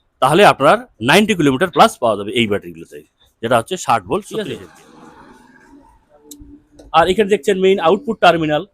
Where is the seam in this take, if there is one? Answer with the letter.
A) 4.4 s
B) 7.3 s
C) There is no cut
A